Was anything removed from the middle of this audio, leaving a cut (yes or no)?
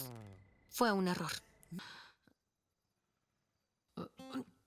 yes